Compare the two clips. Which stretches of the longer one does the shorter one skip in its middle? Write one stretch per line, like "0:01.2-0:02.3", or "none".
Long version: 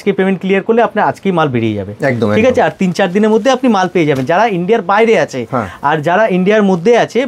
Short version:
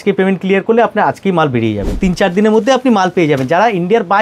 0:02.0-0:02.7